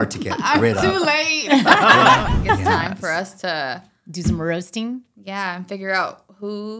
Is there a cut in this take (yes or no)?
yes